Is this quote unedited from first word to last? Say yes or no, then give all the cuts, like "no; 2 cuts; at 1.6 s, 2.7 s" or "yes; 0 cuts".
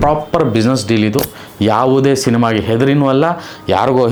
yes; 0 cuts